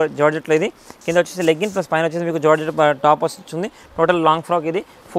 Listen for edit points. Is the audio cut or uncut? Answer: uncut